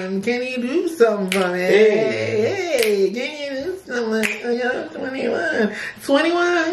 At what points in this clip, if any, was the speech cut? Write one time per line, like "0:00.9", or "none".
none